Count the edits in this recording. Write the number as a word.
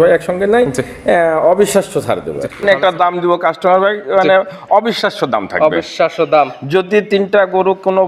one